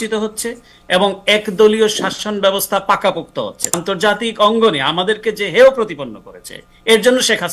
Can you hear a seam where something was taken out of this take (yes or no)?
yes